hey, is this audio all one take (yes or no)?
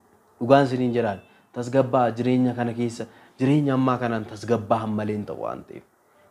yes